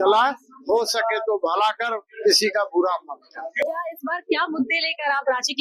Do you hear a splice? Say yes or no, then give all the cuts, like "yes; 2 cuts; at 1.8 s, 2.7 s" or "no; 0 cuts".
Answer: no; 0 cuts